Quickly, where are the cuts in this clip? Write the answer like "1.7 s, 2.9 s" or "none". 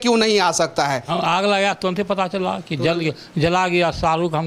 1.1 s